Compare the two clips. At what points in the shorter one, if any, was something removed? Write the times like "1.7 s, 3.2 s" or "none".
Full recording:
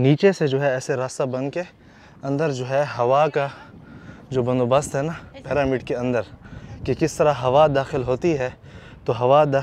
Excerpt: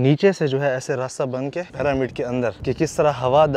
1.7 s, 2.6 s